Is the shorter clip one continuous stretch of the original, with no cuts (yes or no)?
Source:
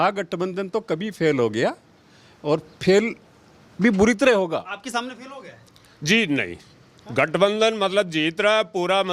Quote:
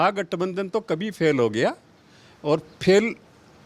yes